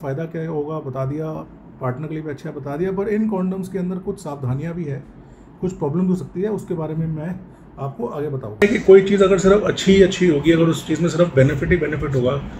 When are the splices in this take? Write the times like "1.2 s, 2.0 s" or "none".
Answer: none